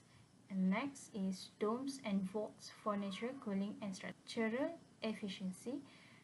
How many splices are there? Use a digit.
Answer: 1